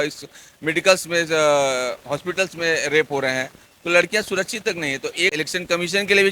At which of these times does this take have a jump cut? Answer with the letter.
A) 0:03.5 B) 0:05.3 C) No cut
B